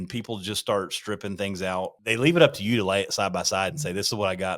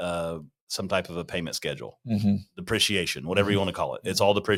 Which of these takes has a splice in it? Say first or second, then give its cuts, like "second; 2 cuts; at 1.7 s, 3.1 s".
first; 1 cut; at 2.0 s